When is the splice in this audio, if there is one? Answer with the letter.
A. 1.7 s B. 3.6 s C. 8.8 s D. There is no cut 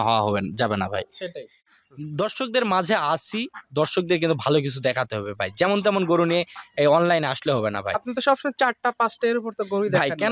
A